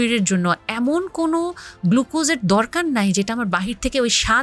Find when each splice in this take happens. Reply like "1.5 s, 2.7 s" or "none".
none